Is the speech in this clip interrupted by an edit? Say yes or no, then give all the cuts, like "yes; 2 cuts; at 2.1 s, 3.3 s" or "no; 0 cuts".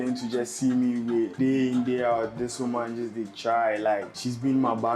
yes; 2 cuts; at 1.3 s, 4.1 s